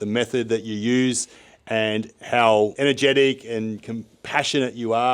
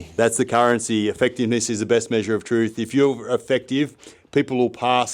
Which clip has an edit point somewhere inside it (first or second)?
first